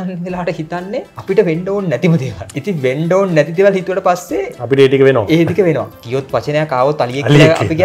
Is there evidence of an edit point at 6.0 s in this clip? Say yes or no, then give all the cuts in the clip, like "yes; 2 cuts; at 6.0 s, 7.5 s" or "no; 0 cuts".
yes; 3 cuts; at 1.1 s, 2.4 s, 6.0 s